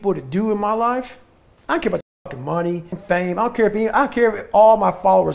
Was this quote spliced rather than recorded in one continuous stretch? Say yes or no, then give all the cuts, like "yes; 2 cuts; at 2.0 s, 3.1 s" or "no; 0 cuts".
yes; 1 cut; at 2.9 s